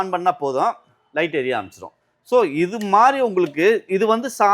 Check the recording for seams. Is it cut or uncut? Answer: uncut